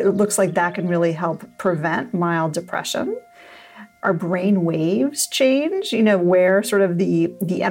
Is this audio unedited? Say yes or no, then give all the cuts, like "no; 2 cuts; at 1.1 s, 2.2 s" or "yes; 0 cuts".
yes; 0 cuts